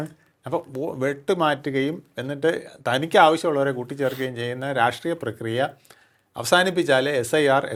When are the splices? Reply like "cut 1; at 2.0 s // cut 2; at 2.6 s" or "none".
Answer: none